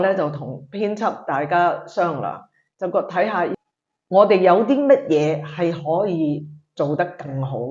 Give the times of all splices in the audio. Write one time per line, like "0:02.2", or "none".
0:03.5